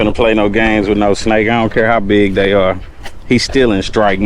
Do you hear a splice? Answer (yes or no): no